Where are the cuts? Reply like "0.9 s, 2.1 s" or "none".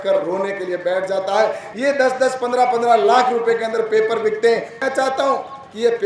1.7 s, 4.8 s